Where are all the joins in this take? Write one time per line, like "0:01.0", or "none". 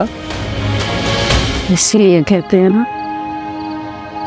0:01.6